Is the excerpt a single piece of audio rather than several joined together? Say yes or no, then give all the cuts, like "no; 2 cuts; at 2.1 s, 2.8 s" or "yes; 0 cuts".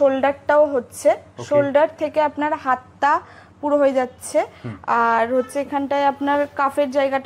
yes; 0 cuts